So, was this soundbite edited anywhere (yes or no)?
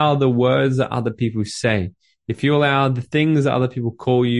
no